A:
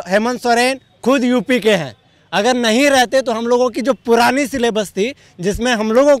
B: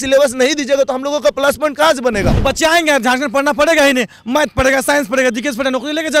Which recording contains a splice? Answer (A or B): B